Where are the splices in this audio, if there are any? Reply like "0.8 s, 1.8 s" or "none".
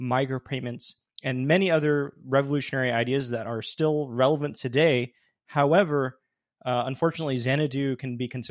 none

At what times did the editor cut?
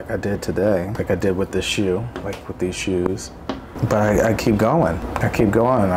0.9 s, 3.7 s, 5.1 s

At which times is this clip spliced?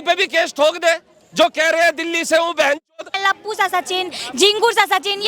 3.0 s

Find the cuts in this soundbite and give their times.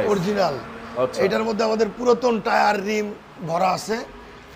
none

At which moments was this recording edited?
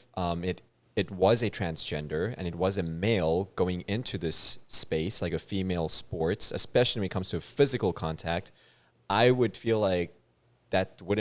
none

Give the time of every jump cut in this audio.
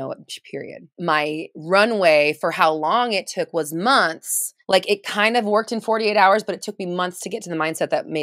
0.9 s, 4.6 s

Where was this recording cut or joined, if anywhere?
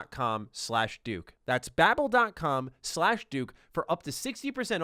none

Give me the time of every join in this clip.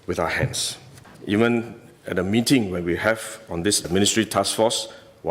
1.1 s

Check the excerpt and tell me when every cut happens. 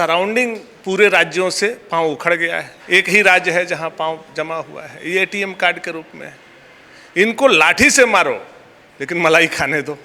none

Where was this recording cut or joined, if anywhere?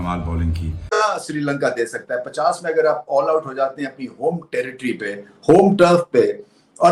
1.0 s

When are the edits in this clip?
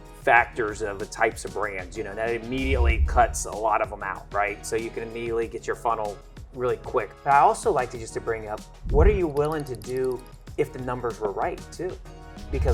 7.1 s

